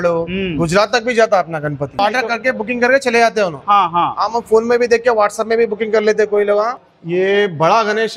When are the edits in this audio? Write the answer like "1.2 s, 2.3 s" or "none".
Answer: 2.0 s, 6.8 s

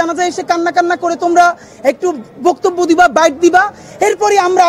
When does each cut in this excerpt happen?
none

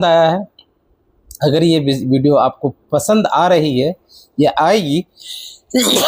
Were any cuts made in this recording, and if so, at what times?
none

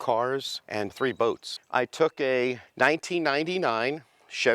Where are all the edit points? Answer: 1.0 s, 2.6 s

